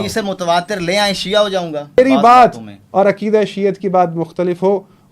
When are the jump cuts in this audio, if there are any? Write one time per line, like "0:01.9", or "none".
0:02.0